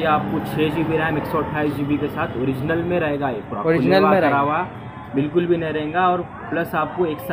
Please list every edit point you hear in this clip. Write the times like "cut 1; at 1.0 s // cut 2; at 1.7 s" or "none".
none